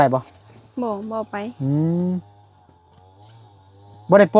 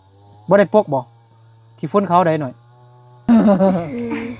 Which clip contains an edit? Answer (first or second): second